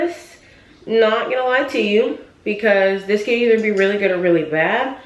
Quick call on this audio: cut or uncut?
uncut